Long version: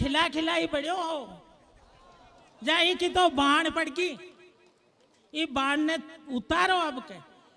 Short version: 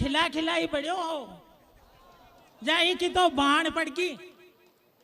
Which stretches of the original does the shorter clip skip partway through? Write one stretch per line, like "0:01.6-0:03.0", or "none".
none